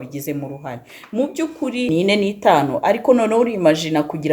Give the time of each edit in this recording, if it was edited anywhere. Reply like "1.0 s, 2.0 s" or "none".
1.9 s